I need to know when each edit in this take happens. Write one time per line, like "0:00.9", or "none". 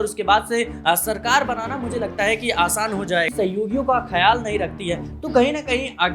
0:03.3